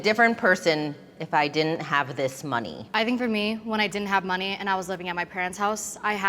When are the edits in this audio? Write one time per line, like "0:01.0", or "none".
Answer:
0:02.8